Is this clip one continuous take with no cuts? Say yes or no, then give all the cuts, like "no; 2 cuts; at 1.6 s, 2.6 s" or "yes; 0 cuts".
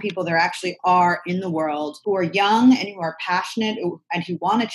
no; 1 cut; at 1.9 s